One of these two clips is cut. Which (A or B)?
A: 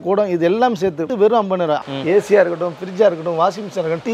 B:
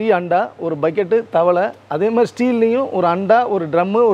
A